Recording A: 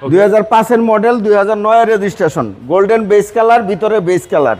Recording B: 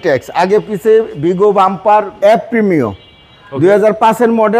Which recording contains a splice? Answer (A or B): B